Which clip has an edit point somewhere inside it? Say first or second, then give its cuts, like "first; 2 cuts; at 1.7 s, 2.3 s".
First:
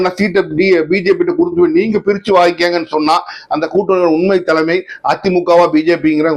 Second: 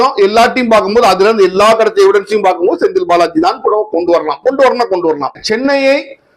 second; 1 cut; at 5.4 s